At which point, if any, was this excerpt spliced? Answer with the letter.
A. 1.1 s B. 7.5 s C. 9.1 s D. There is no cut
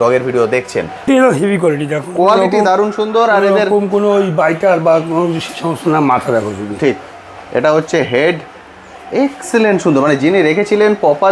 A